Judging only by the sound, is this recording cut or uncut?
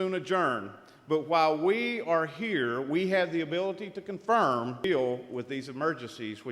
cut